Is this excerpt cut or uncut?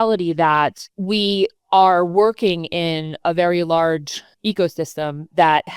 uncut